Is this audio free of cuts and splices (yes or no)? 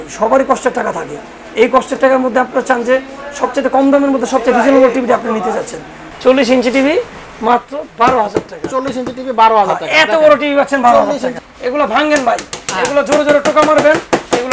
no